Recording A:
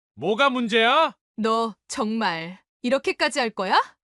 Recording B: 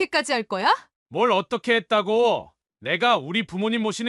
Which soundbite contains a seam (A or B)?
A